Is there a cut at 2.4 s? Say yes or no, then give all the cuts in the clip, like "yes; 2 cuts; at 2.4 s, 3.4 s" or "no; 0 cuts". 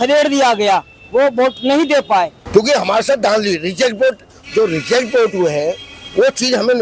yes; 1 cut; at 2.4 s